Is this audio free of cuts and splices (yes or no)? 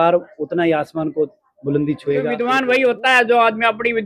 no